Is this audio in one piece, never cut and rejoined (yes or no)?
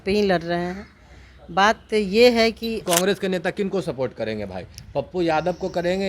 no